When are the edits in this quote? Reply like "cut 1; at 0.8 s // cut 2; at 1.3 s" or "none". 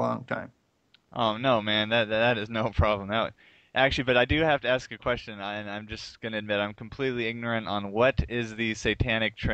none